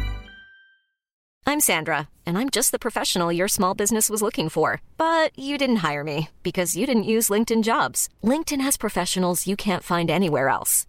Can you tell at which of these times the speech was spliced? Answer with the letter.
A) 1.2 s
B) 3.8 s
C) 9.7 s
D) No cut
A